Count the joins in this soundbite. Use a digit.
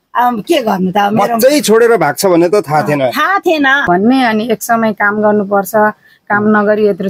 1